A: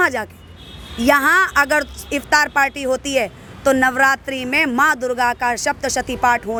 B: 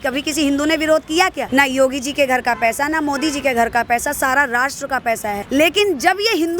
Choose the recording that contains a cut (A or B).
B